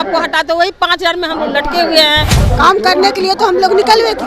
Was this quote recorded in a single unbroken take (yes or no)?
no